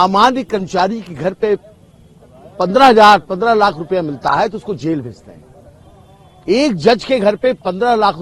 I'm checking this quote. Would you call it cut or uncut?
uncut